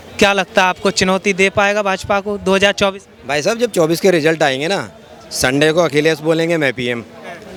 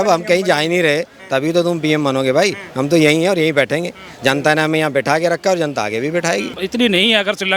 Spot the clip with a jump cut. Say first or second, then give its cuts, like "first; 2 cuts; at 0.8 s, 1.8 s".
second; 1 cut; at 6.6 s